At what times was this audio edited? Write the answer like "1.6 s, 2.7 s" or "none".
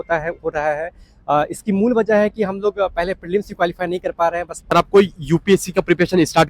4.7 s